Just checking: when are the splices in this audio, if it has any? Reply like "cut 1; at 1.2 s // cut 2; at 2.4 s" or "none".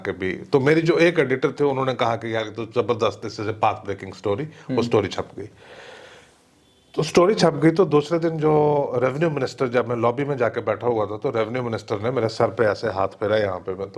none